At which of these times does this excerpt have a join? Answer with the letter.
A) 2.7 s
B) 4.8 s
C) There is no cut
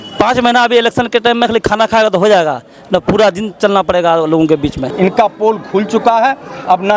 B